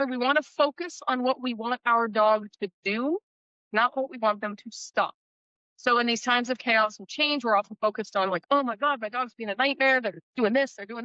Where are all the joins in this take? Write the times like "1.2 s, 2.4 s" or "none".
none